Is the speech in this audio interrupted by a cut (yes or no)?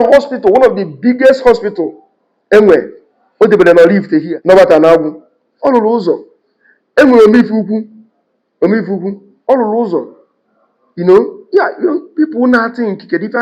yes